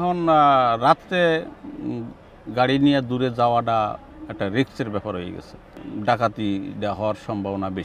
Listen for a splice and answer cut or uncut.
cut